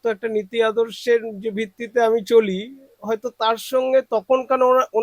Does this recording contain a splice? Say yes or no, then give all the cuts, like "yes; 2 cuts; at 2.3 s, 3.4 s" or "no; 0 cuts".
no; 0 cuts